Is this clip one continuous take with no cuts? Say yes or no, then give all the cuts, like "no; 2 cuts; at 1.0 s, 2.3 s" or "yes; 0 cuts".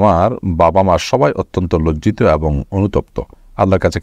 yes; 0 cuts